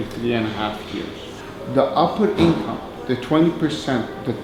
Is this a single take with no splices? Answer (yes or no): yes